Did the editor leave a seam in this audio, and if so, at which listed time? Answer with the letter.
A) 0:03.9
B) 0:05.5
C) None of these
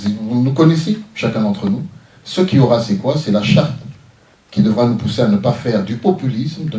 C